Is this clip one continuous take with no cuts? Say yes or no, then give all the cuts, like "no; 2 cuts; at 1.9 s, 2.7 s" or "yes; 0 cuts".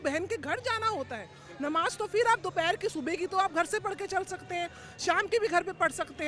yes; 0 cuts